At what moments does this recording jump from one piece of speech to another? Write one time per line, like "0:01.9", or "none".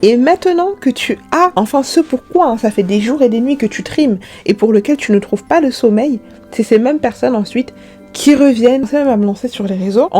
0:08.9